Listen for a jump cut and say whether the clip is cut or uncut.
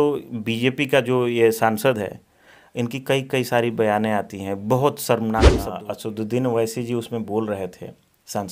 cut